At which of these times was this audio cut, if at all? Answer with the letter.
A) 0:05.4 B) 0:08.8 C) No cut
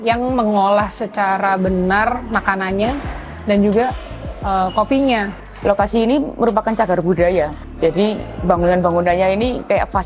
A